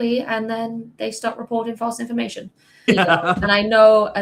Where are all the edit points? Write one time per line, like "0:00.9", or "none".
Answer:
0:02.9